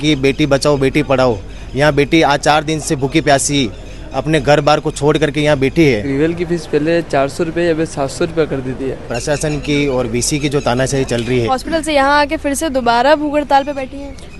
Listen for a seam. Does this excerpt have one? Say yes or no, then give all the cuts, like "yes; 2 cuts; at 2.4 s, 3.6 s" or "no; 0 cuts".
yes; 3 cuts; at 6.1 s, 9.1 s, 11.5 s